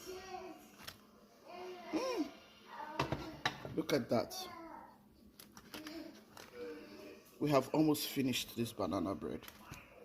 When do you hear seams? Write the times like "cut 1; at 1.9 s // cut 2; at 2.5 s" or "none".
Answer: none